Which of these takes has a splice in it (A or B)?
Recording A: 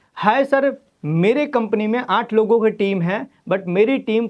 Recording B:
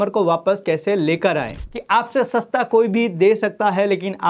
B